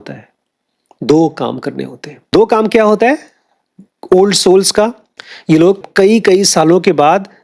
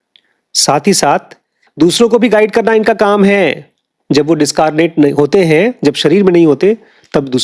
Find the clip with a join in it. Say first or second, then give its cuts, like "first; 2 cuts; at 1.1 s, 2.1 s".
first; 2 cuts; at 2.3 s, 5.9 s